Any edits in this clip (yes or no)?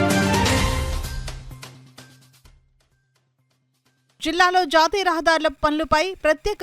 yes